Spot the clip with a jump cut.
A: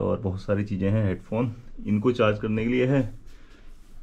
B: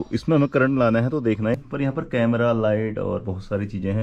B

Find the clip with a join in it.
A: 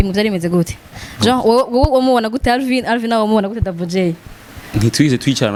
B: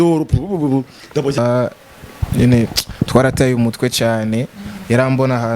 B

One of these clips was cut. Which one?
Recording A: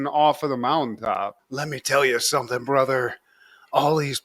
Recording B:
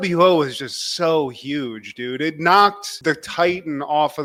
A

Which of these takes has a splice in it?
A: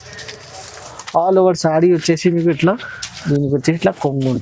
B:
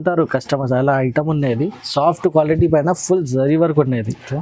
A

